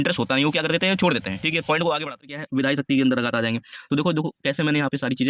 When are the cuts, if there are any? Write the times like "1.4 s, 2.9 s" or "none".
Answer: 2.4 s